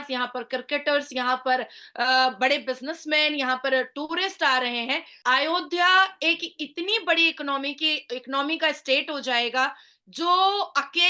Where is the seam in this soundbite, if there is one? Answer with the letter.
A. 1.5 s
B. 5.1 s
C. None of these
B